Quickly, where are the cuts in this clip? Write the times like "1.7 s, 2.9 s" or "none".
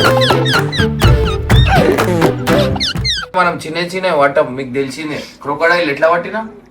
3.3 s